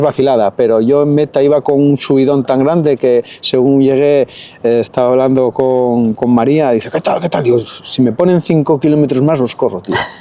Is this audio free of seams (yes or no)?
yes